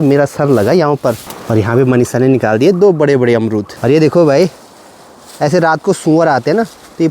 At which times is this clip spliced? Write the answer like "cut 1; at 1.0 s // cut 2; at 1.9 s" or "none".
cut 1; at 1.3 s // cut 2; at 3.7 s